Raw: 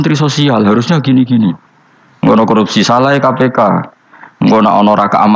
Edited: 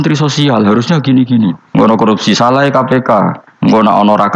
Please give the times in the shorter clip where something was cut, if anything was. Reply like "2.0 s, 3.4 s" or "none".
1.9 s, 3.4 s